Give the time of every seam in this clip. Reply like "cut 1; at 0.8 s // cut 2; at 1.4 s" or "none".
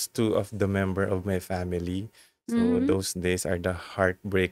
none